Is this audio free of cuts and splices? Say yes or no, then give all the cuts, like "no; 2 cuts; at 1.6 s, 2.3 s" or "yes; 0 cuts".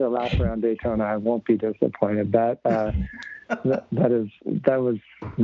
yes; 0 cuts